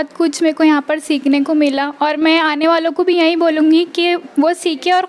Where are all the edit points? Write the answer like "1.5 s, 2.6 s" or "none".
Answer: none